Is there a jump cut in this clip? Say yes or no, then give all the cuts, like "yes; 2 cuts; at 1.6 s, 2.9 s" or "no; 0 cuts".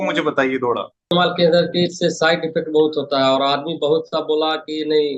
yes; 1 cut; at 1.1 s